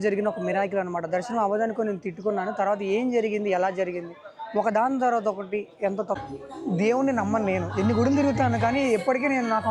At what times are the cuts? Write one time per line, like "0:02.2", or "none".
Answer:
0:06.2